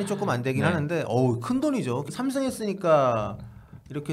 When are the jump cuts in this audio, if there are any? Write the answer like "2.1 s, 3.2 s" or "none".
2.1 s